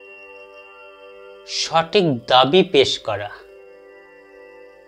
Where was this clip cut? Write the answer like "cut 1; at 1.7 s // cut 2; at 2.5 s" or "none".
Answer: cut 1; at 1.6 s // cut 2; at 3.7 s